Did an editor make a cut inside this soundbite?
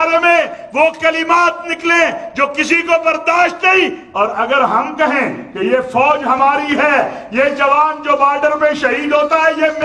no; 0 cuts

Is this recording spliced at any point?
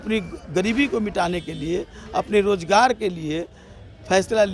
no; 0 cuts

